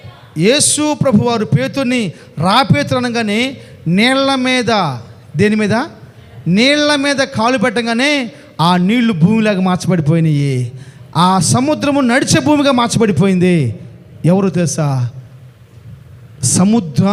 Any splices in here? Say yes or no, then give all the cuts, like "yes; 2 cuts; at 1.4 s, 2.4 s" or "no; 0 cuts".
no; 0 cuts